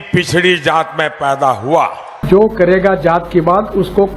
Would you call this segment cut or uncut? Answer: cut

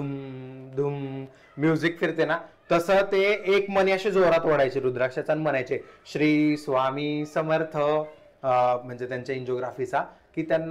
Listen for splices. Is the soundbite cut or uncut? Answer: cut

